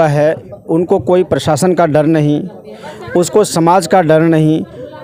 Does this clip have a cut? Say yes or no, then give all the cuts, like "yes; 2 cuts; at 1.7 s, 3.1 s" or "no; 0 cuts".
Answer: no; 0 cuts